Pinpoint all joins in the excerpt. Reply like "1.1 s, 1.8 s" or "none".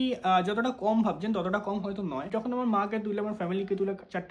2.3 s

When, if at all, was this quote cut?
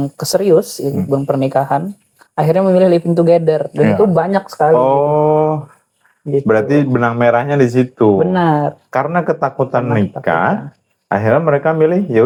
none

